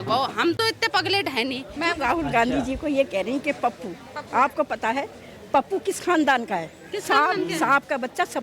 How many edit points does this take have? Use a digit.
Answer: 1